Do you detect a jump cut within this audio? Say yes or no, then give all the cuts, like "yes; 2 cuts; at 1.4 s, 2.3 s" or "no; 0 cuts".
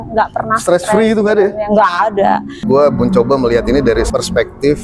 yes; 1 cut; at 2.6 s